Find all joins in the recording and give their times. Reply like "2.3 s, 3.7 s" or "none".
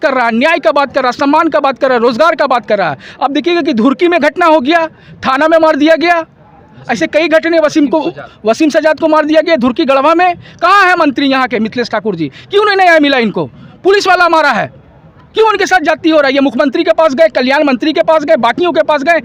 none